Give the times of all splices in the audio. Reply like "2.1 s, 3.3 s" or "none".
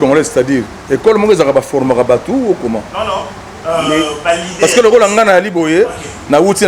none